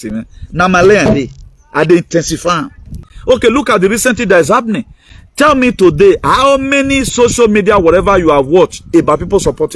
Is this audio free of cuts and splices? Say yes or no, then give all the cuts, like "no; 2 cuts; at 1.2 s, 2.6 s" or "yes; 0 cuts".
no; 1 cut; at 3.1 s